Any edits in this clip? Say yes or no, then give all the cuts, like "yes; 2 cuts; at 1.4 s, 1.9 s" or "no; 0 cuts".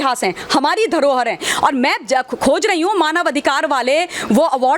yes; 1 cut; at 1.4 s